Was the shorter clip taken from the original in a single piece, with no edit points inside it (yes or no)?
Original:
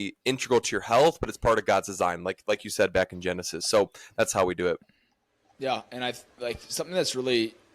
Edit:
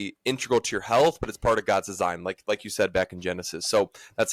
yes